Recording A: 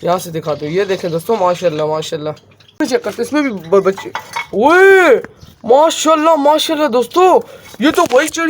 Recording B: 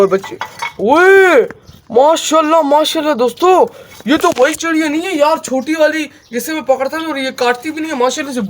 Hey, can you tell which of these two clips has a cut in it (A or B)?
A